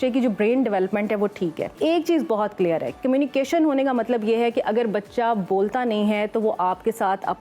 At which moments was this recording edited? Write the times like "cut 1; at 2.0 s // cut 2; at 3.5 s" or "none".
cut 1; at 1.7 s